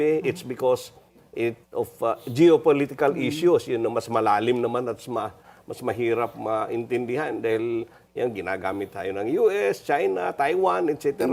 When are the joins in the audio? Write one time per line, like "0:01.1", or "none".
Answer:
none